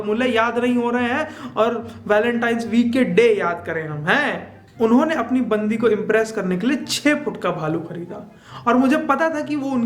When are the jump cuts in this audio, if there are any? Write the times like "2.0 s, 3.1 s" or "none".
4.7 s